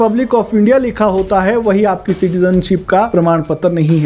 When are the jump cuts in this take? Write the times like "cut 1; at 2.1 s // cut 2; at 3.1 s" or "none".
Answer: cut 1; at 3.1 s